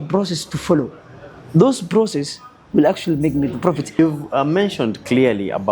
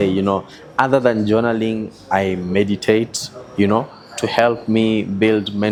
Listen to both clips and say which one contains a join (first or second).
first